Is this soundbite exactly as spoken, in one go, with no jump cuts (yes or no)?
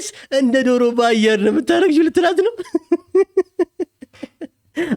yes